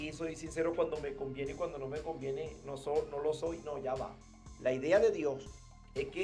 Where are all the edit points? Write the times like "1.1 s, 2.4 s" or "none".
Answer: none